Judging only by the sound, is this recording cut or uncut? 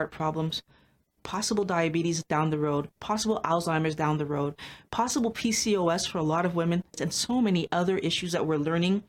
cut